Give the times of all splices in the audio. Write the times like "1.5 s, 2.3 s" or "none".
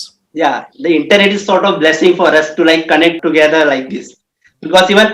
3.2 s